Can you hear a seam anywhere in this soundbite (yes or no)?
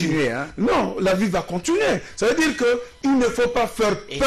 no